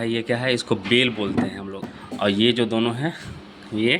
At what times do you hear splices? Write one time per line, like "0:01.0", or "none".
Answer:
0:01.9